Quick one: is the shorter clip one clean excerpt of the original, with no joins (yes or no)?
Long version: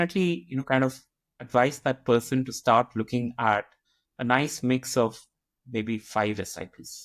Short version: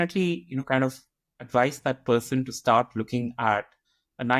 yes